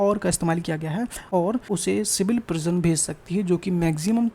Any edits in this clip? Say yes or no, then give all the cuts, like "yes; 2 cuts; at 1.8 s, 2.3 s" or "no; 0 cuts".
yes; 1 cut; at 1.4 s